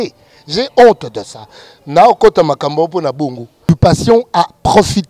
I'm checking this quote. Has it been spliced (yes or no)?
yes